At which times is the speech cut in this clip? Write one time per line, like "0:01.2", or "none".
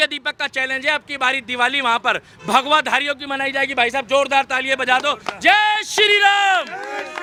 none